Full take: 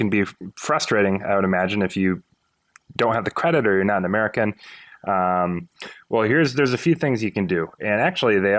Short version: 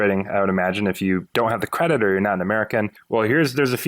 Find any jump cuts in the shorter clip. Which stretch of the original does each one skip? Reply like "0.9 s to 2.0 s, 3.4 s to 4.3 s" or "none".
2.2 s to 2.9 s, 4.6 s to 6.0 s